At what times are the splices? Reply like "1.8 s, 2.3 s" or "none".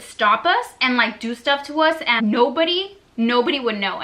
2.2 s